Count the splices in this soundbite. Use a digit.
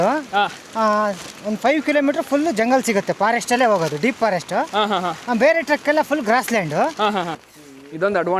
1